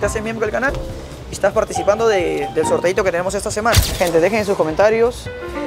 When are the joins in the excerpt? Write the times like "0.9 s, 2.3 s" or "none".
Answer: 3.9 s

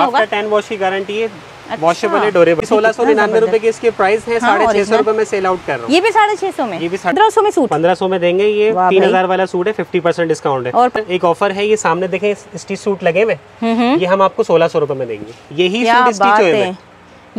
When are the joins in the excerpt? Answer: 2.6 s, 7.1 s, 10.9 s

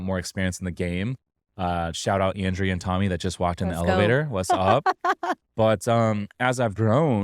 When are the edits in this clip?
none

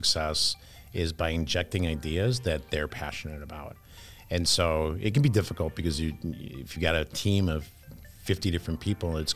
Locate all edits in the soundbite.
none

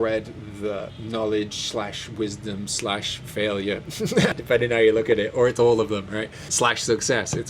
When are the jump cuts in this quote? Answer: 1.0 s, 4.3 s, 6.4 s

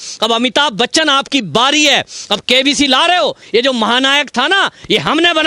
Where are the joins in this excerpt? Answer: 3.4 s

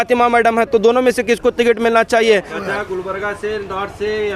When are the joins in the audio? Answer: 2.4 s

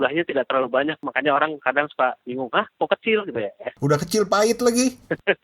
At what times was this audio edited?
1.0 s, 3.7 s

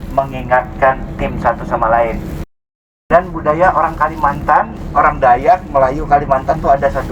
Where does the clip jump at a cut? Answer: 2.7 s

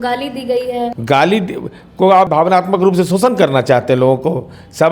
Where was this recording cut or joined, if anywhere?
0.9 s, 2.3 s

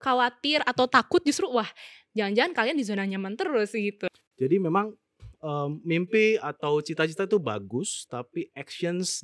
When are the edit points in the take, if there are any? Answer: 4.1 s

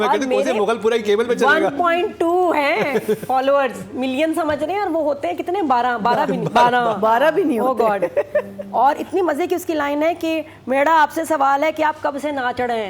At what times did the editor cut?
none

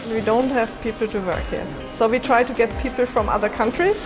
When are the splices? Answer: 1.8 s

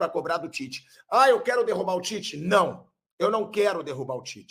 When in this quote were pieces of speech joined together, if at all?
none

